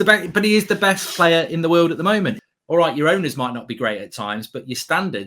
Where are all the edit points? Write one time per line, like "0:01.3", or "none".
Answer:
0:02.5